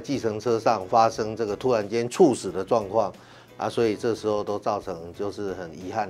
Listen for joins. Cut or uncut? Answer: uncut